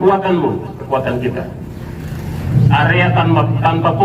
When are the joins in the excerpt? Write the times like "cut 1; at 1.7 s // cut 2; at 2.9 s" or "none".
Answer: cut 1; at 2.5 s